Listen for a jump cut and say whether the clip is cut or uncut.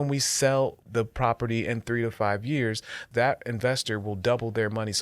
cut